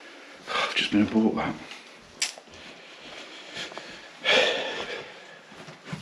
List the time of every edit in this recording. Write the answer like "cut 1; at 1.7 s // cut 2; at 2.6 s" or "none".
none